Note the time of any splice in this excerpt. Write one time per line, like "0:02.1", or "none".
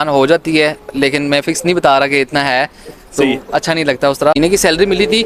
0:04.4

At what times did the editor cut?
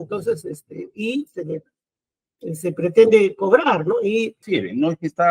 0:04.4

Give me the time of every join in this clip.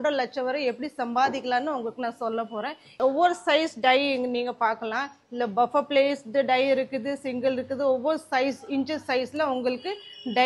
none

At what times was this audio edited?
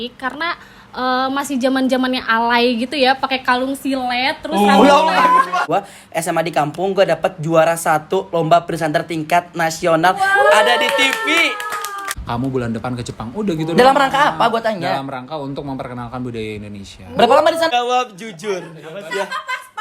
0:05.6
0:12.1
0:17.7

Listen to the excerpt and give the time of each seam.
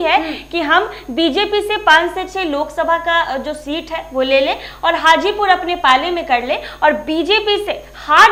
none

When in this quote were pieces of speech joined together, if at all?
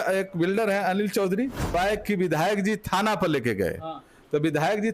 0:01.7

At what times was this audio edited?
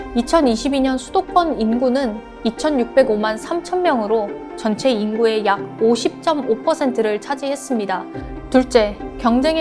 0:08.2

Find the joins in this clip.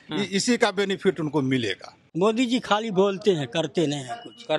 0:02.0

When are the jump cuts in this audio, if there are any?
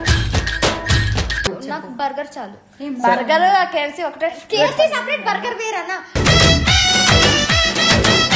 0:01.5

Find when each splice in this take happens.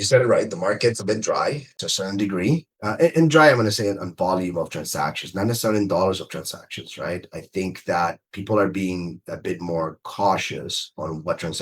0:01.8

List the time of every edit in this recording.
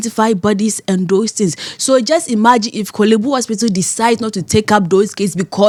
none

